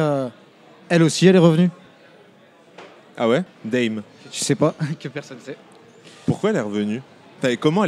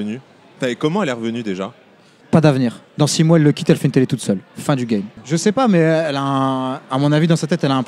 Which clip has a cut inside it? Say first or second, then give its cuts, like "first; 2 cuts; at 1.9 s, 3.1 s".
second; 2 cuts; at 2.1 s, 5.2 s